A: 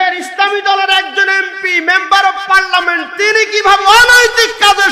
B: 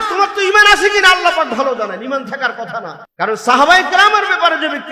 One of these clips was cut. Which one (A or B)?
B